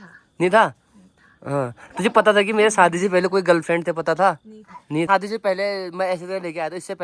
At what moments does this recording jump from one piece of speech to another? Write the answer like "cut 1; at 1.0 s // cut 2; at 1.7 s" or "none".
cut 1; at 5.0 s